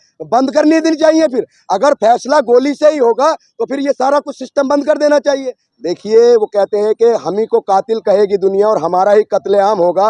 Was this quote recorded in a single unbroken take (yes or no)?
no